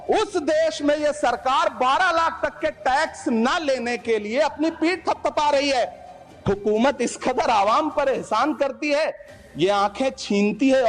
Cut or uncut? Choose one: uncut